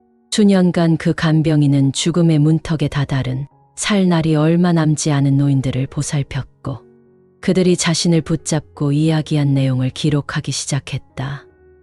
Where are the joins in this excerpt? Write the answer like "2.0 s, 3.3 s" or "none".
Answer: none

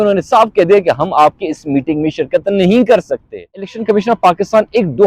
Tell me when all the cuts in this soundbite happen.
3.7 s

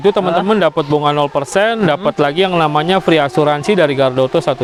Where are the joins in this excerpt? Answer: none

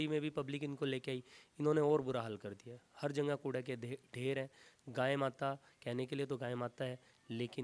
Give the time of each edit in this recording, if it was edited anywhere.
none

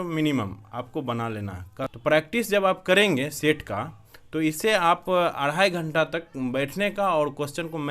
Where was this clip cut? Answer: 1.7 s

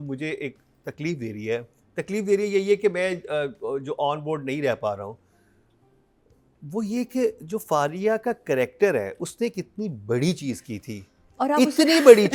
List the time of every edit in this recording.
none

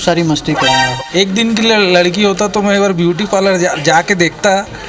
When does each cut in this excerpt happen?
1.0 s

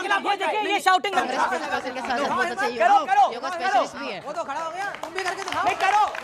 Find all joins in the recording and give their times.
1.1 s

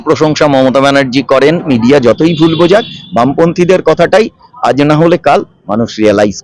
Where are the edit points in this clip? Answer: 1.7 s

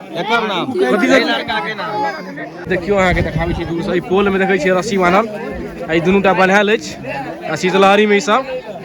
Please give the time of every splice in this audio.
2.7 s

